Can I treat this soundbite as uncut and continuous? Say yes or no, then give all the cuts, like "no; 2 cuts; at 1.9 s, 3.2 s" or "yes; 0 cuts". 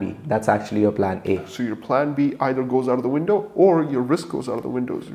no; 1 cut; at 1.5 s